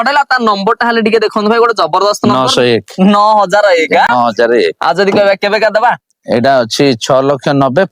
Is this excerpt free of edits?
yes; 0 cuts

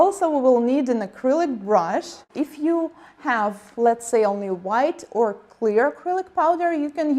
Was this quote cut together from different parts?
no; 0 cuts

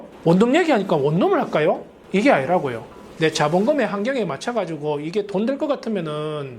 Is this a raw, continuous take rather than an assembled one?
no; 1 cut; at 3.2 s

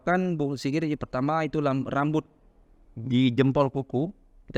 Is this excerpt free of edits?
yes; 0 cuts

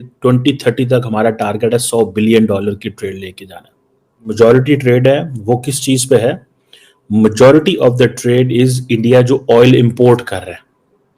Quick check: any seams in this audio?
yes; 1 cut; at 4.3 s

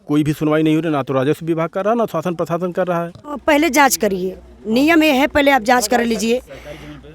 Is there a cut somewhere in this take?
yes; 1 cut; at 3.3 s

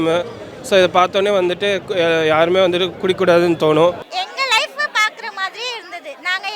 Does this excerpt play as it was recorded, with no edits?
no; 1 cut; at 4.1 s

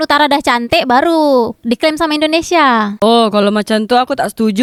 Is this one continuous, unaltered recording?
yes; 0 cuts

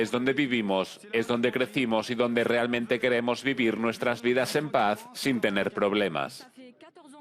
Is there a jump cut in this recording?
yes; 1 cut; at 6.3 s

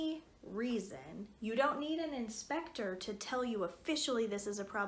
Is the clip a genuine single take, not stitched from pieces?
yes; 0 cuts

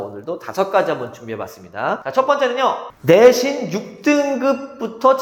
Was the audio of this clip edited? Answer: yes; 2 cuts; at 2.0 s, 2.9 s

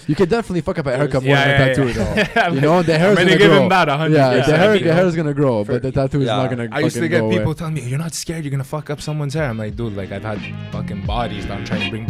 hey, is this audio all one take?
yes; 0 cuts

